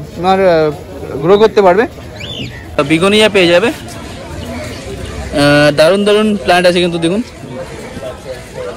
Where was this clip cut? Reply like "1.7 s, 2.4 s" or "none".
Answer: 2.8 s